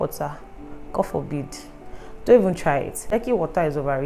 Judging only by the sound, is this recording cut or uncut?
cut